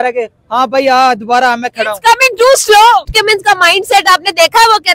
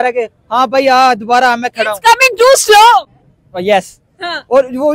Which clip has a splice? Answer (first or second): first